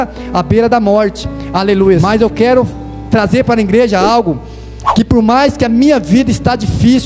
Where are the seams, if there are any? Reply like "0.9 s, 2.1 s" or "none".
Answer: 2.0 s